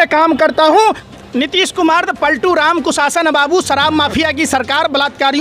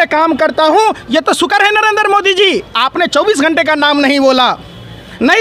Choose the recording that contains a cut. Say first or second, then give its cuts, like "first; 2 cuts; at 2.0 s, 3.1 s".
first; 1 cut; at 1.0 s